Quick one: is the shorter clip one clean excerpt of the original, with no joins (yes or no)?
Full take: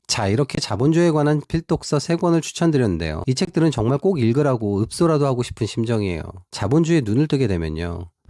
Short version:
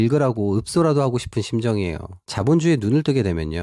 yes